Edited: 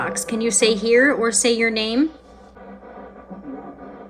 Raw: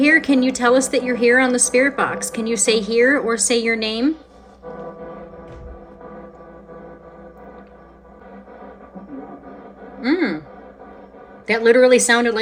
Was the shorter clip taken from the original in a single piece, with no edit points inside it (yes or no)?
no